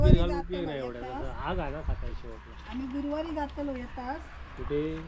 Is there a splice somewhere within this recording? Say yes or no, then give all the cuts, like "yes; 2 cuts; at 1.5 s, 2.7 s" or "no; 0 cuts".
no; 0 cuts